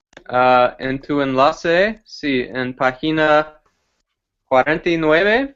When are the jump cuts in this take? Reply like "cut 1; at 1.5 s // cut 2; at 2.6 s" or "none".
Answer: none

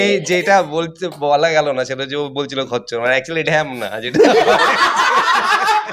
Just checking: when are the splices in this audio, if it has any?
none

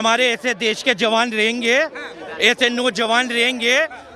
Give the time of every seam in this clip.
none

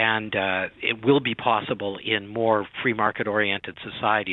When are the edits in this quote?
none

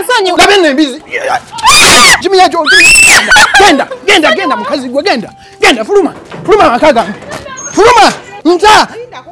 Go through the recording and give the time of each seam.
cut 1; at 8.3 s

